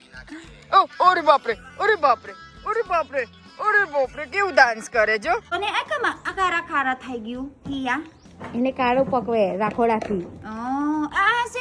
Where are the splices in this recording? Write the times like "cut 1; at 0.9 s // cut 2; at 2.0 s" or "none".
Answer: cut 1; at 5.6 s

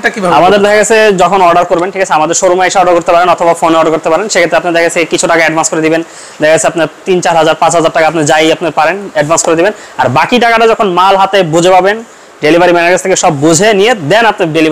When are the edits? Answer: none

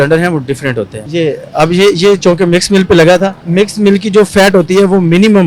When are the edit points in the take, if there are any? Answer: cut 1; at 1.0 s

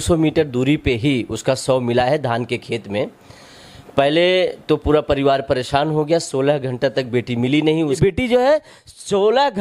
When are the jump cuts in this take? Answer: cut 1; at 7.9 s

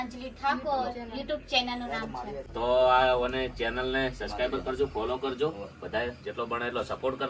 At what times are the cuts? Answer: cut 1; at 2.4 s

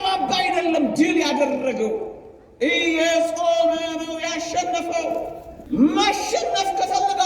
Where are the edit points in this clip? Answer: cut 1; at 5.5 s

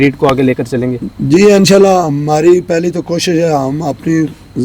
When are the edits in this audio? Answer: none

